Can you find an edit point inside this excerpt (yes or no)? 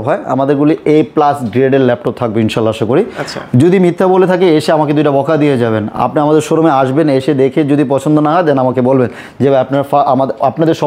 no